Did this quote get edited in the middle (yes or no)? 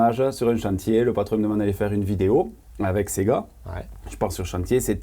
no